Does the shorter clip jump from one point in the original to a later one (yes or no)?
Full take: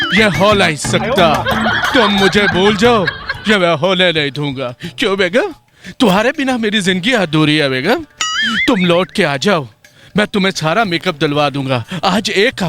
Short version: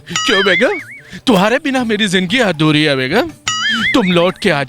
no